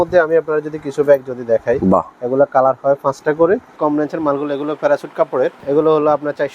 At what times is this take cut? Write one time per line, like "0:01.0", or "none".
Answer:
0:03.8
0:05.6